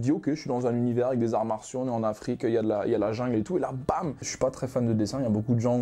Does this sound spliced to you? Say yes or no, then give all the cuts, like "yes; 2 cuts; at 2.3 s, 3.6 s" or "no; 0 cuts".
yes; 1 cut; at 4.3 s